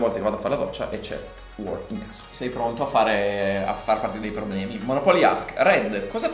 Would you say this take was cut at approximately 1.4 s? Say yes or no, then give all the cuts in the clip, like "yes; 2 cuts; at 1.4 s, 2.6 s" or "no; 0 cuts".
yes; 2 cuts; at 1.4 s, 2.3 s